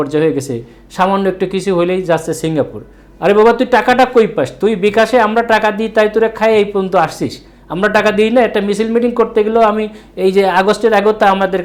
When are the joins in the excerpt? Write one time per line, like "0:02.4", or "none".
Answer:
none